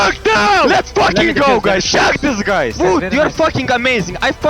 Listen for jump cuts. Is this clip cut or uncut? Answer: cut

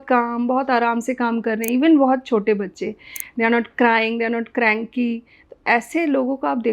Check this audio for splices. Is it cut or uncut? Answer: uncut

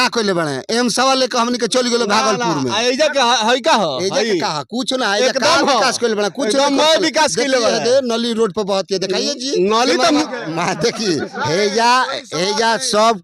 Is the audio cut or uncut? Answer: cut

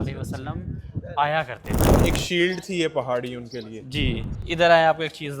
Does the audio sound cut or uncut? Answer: cut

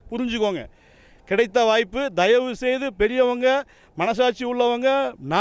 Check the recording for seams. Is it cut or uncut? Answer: uncut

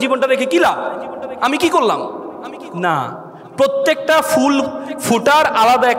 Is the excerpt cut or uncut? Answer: uncut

